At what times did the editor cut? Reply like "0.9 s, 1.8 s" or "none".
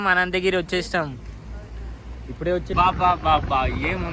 2.7 s